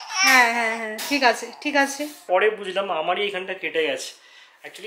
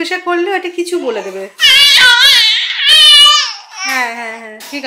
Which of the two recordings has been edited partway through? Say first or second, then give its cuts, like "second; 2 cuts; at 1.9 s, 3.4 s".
first; 1 cut; at 2.2 s